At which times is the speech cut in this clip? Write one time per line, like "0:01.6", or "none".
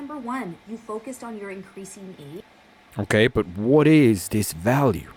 none